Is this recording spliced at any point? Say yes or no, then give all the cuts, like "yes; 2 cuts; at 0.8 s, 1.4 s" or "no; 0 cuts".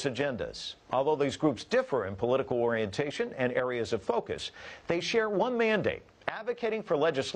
yes; 1 cut; at 2.0 s